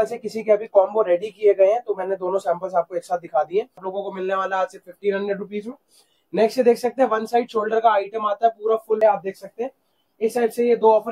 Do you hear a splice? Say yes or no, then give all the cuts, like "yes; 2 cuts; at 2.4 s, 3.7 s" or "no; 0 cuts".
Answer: yes; 2 cuts; at 3.9 s, 9.0 s